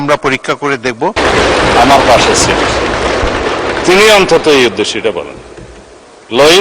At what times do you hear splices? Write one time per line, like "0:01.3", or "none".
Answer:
0:01.2